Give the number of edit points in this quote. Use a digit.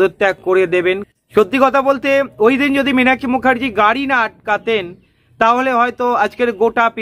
1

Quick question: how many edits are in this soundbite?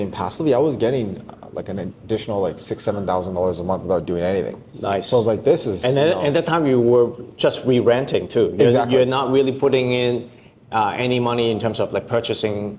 0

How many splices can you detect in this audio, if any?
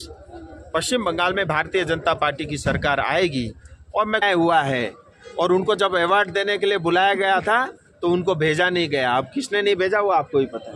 1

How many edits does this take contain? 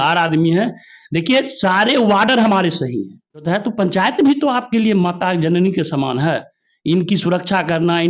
1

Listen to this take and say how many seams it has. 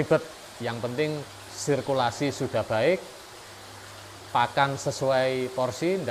0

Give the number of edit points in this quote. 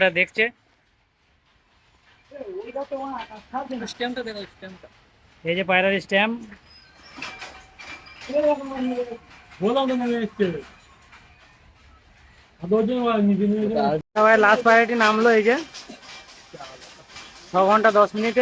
0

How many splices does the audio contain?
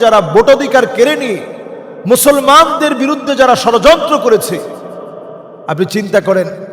0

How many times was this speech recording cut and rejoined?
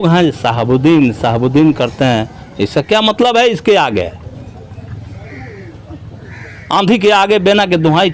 0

